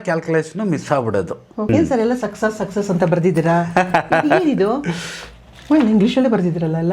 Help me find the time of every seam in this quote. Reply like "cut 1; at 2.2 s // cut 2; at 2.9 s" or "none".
cut 1; at 1.7 s